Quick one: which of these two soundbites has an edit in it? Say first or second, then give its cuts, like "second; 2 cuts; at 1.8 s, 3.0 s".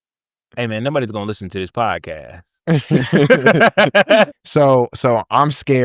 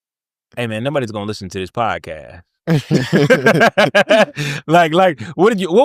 first; 1 cut; at 4.4 s